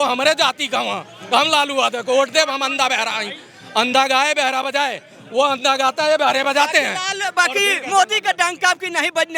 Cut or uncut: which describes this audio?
uncut